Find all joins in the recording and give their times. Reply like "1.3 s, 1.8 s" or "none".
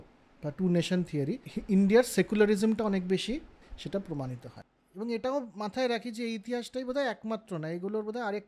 1.5 s, 3.7 s, 4.6 s